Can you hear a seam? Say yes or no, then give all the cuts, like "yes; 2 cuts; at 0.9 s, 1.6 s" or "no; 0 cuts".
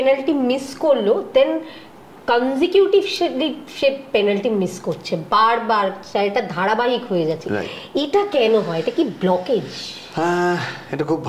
no; 0 cuts